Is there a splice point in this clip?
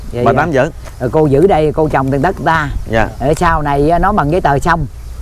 no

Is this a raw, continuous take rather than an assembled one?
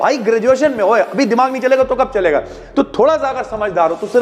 yes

